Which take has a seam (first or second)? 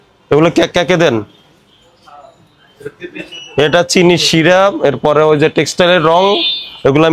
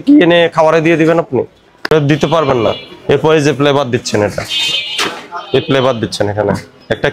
second